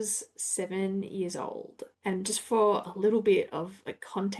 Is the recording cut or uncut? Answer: uncut